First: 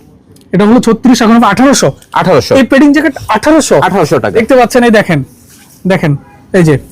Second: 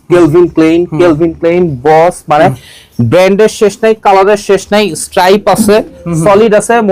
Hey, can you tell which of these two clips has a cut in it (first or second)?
first